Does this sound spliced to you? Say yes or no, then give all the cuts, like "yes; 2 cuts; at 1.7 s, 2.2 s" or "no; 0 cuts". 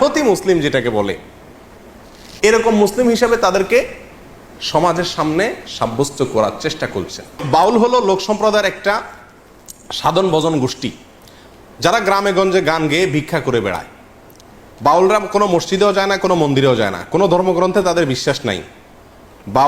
yes; 1 cut; at 7.4 s